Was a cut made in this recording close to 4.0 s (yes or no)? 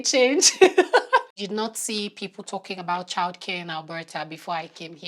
no